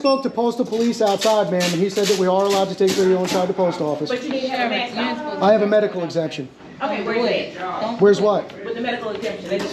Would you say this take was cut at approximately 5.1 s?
yes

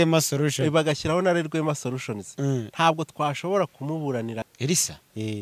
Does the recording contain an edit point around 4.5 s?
yes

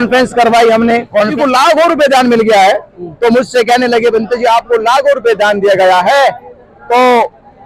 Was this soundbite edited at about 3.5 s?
no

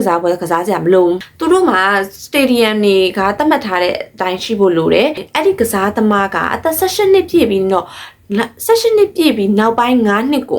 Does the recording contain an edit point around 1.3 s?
yes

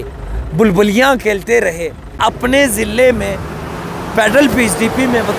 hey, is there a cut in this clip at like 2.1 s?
yes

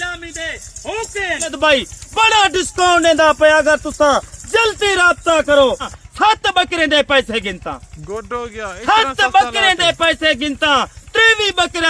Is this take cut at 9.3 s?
no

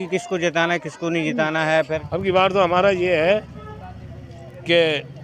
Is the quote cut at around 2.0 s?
yes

